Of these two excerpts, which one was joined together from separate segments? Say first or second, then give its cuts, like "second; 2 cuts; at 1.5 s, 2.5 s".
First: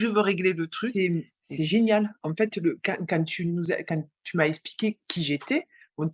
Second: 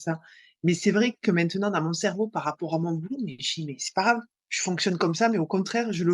first; 1 cut; at 0.9 s